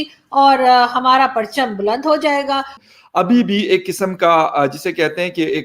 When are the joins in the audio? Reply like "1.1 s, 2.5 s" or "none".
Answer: 2.7 s